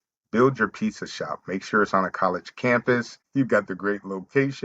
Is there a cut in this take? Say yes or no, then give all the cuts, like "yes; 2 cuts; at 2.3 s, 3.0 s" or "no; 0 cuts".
yes; 1 cut; at 3.2 s